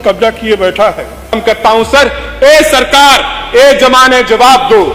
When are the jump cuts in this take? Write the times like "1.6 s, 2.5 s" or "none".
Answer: 1.3 s